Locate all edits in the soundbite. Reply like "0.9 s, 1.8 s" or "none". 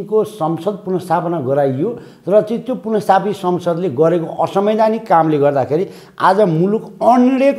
none